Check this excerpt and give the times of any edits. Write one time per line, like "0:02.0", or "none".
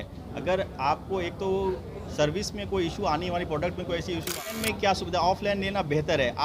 0:04.5